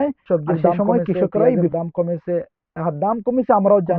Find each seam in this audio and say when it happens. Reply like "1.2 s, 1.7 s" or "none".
1.7 s